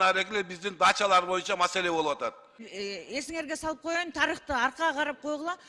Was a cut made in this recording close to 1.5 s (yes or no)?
no